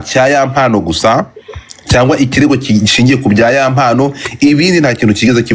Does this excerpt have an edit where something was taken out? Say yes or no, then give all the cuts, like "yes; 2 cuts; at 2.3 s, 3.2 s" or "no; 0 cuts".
no; 0 cuts